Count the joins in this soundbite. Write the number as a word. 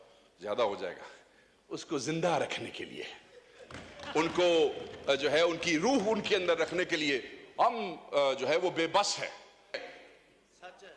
one